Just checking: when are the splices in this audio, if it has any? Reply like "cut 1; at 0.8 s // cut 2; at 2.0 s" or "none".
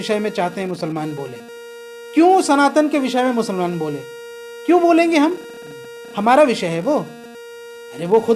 none